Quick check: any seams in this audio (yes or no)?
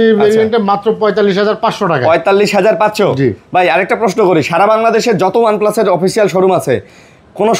no